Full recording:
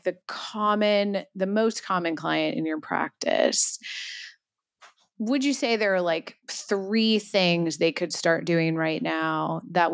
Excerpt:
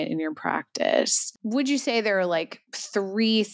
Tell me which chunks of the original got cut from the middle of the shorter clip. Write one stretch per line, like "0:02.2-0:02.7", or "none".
0:03.7-0:05.0